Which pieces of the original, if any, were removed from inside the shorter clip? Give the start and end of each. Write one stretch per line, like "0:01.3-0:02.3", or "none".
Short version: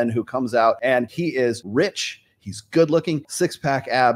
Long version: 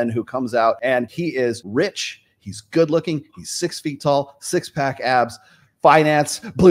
0:03.3-0:04.4